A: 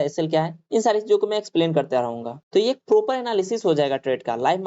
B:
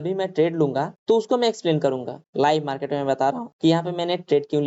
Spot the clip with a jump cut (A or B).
A